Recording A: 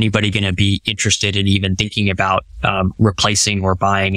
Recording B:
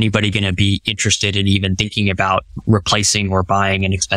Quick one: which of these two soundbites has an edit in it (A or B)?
B